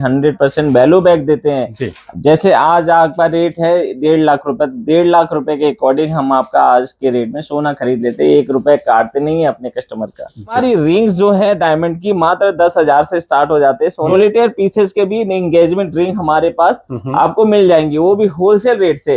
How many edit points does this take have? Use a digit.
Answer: 2